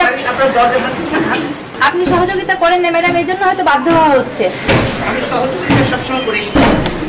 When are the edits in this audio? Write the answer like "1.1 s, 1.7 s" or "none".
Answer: none